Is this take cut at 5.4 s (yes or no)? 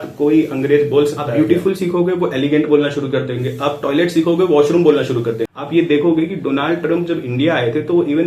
yes